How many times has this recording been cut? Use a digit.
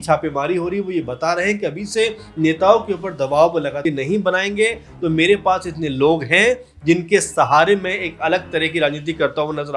1